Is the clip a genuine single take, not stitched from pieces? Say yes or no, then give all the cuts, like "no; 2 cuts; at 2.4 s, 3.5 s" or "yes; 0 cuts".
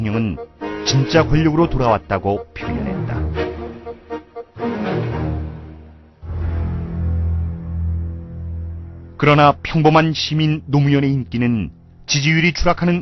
no; 1 cut; at 1.1 s